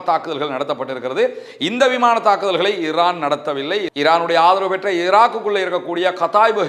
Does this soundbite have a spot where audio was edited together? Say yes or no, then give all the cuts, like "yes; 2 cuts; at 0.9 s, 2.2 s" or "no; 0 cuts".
no; 0 cuts